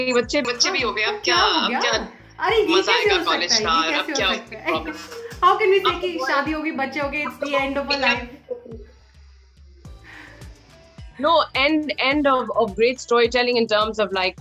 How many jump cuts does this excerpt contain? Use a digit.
0